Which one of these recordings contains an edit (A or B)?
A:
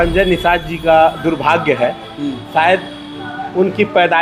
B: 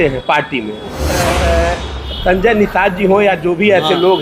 B